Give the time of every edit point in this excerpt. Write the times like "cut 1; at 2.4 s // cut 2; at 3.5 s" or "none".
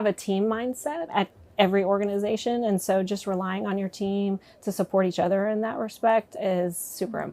cut 1; at 1.0 s // cut 2; at 6.3 s